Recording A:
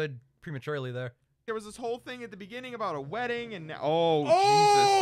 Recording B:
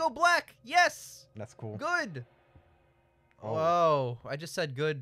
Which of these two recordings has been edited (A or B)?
A